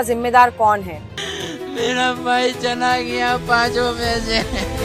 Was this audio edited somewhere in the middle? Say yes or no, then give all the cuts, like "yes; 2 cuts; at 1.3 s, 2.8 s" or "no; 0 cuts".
yes; 1 cut; at 1.1 s